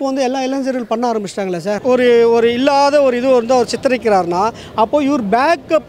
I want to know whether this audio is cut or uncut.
cut